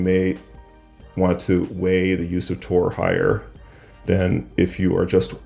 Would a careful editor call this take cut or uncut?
uncut